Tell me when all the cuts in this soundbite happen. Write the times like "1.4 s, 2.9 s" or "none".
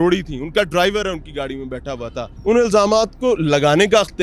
2.3 s